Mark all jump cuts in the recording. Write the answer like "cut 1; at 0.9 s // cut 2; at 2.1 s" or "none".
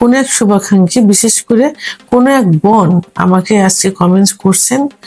none